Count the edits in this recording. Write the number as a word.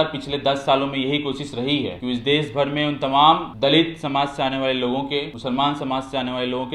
three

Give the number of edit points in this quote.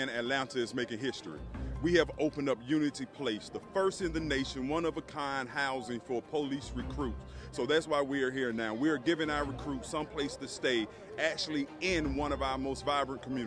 zero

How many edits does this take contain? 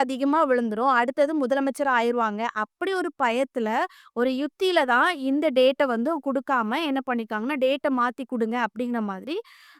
zero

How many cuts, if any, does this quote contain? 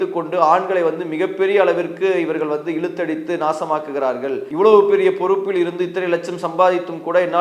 one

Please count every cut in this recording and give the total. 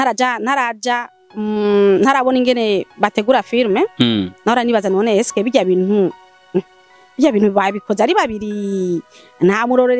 zero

